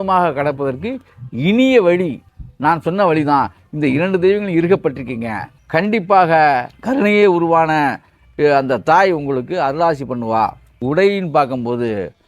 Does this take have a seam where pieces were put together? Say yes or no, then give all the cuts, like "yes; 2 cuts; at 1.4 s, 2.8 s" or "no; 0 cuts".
yes; 1 cut; at 10.8 s